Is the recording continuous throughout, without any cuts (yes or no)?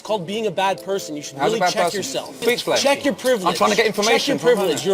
no